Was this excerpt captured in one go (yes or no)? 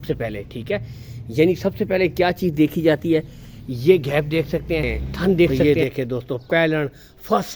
no